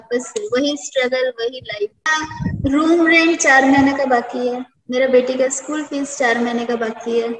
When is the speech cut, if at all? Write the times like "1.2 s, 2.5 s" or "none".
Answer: 2.2 s